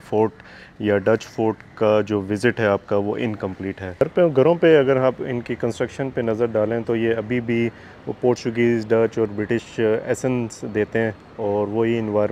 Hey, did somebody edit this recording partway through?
yes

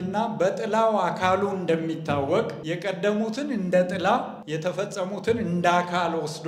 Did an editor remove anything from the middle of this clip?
yes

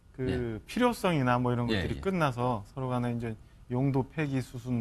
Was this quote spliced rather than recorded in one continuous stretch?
no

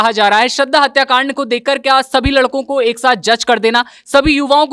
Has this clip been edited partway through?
no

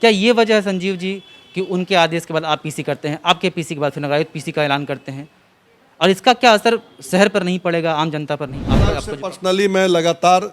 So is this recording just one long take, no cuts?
no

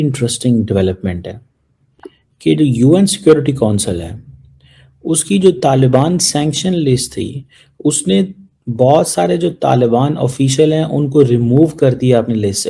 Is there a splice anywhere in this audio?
no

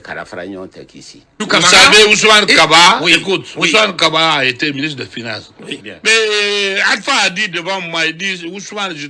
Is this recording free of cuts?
no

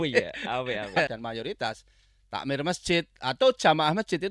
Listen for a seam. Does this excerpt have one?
yes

